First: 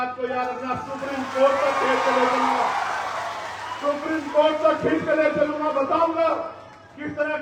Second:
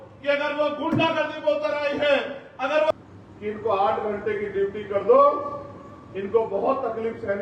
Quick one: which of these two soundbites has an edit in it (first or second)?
second